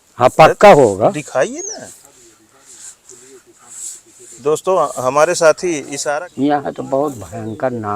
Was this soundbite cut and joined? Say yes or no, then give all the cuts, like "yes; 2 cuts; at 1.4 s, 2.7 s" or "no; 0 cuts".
yes; 1 cut; at 5.9 s